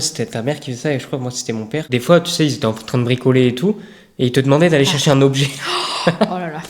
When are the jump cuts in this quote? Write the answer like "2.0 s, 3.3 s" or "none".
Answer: 1.9 s